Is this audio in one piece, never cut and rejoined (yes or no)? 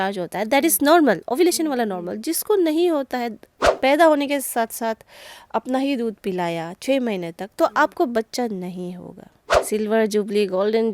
no